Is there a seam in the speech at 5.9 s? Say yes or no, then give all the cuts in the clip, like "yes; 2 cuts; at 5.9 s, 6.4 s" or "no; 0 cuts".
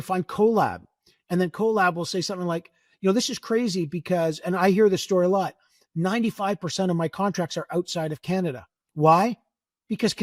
no; 0 cuts